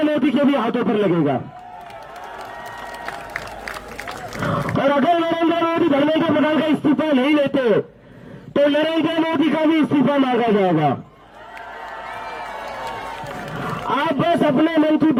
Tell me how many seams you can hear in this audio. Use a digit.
0